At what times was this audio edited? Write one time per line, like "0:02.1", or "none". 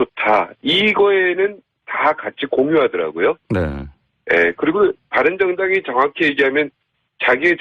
0:04.0